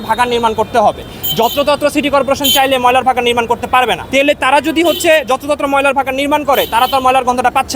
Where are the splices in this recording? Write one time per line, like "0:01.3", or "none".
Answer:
none